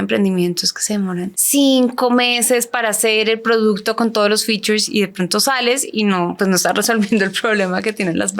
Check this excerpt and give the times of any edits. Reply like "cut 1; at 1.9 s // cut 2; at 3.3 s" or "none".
cut 1; at 1.4 s